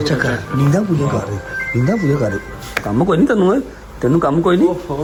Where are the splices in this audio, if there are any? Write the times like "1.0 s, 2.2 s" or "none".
none